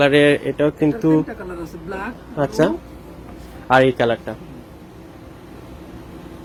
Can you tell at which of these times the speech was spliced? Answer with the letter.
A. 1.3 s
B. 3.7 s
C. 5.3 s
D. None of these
D